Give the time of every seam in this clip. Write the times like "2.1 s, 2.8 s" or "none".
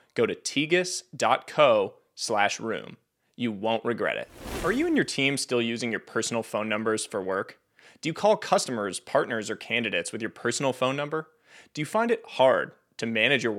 4.6 s